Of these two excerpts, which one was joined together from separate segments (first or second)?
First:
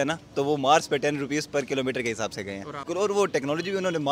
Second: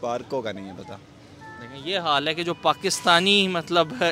first